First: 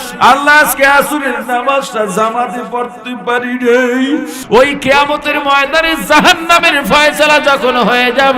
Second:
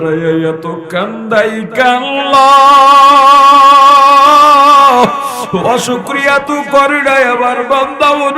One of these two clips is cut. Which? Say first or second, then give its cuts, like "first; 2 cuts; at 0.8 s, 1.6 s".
first; 1 cut; at 4.4 s